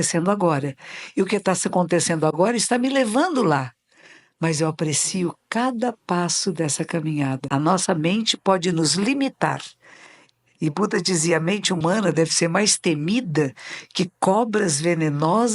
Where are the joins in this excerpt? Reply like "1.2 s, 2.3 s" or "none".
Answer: 7.4 s